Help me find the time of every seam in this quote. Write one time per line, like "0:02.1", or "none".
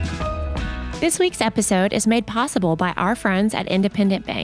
0:00.9